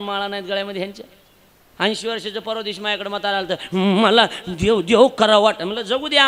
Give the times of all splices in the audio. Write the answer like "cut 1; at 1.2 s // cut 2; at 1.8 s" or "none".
none